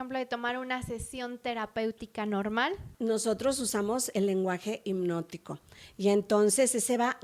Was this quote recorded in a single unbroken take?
no; 1 cut; at 2.8 s

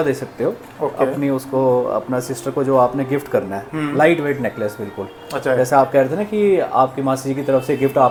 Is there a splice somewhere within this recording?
no; 0 cuts

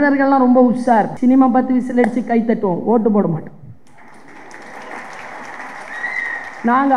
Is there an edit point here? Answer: yes; 1 cut; at 1.1 s

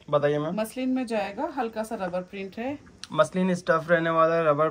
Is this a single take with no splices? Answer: yes; 0 cuts

